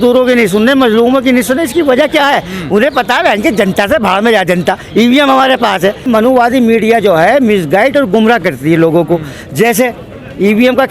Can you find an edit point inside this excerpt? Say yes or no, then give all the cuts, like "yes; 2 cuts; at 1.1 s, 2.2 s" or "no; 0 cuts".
yes; 1 cut; at 6.1 s